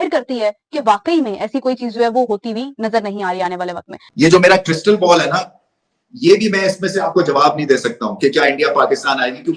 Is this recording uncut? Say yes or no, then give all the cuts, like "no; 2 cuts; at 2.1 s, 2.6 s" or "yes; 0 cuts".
no; 1 cut; at 4.0 s